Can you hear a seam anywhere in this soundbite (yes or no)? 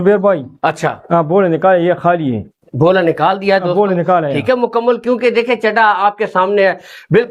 no